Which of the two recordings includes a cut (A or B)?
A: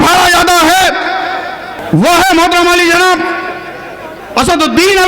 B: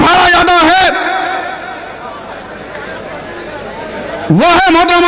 A